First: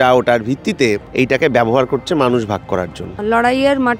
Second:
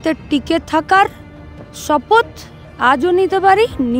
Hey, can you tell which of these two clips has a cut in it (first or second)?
first